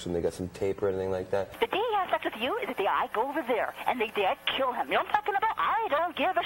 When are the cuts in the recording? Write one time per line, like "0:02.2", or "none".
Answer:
0:01.5